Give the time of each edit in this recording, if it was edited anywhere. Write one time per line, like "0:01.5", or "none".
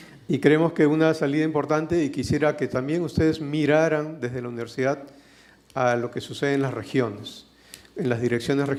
none